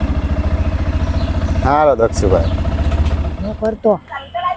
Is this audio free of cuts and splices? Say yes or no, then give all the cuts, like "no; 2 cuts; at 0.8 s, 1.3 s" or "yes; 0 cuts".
no; 1 cut; at 3.3 s